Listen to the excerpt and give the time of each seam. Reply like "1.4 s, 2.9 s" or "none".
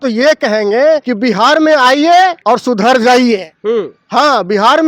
1.1 s, 2.4 s